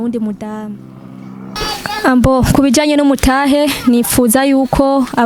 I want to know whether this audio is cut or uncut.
cut